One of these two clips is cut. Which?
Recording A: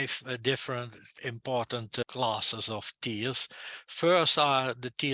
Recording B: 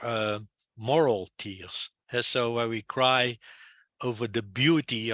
A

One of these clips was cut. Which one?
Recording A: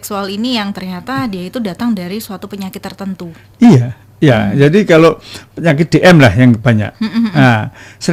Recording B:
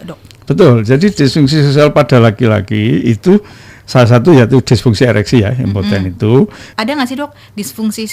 B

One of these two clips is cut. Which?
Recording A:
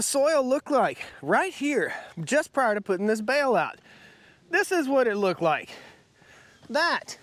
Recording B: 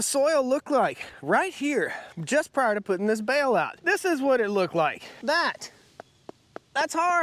B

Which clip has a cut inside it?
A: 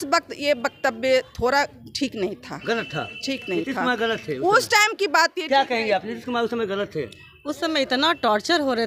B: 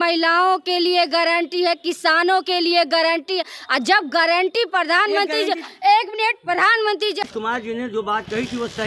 B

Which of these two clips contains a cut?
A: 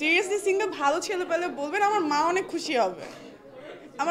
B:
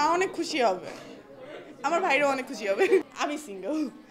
B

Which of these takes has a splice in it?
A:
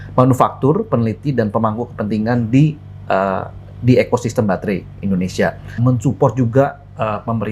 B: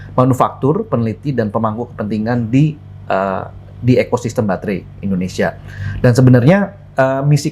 A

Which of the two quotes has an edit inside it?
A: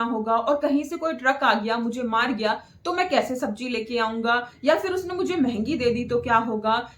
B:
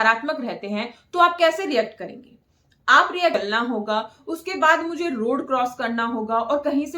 B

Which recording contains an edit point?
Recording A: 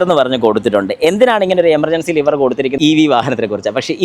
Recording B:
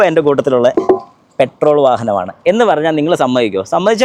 A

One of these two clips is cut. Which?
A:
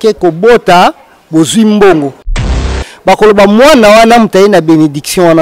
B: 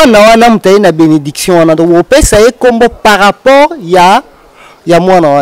A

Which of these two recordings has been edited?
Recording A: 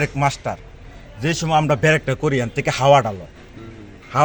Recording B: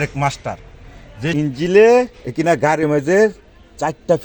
B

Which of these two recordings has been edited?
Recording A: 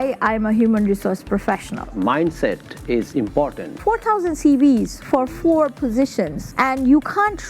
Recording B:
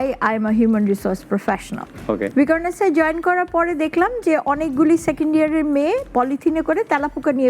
A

